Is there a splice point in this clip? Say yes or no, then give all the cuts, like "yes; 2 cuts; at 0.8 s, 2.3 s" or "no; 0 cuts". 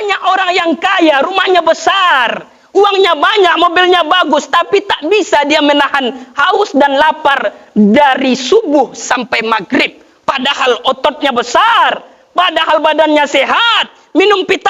no; 0 cuts